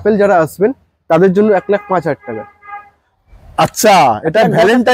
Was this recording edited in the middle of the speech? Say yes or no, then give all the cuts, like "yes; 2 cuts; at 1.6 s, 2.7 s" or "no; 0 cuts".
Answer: no; 0 cuts